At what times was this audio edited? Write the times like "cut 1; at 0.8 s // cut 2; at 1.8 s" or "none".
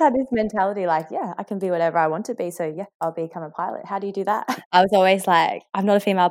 cut 1; at 2.9 s // cut 2; at 4.5 s